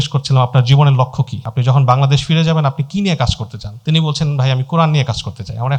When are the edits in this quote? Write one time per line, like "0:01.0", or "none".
none